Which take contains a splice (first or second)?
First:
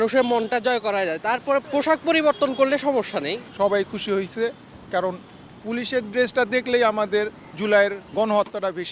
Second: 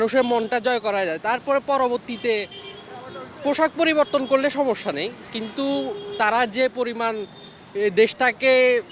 first